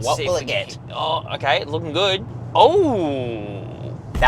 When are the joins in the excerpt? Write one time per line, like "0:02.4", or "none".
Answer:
0:02.3